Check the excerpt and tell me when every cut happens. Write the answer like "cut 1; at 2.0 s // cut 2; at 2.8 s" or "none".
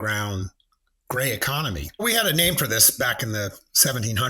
cut 1; at 2.0 s